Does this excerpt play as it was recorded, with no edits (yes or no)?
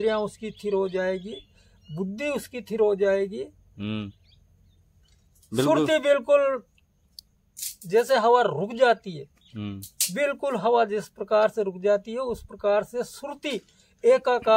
yes